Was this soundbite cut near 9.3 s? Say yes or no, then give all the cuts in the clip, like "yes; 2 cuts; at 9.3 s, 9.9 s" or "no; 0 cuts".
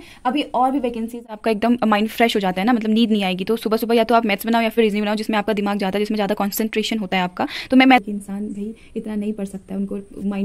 no; 2 cuts; at 1.4 s, 8.0 s